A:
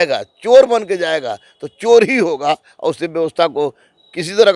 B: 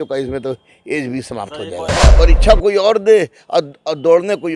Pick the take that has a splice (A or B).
B